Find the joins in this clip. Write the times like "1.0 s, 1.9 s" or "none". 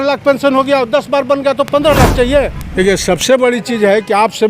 2.6 s